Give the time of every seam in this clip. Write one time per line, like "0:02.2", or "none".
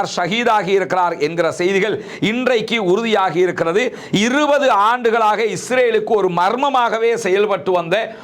none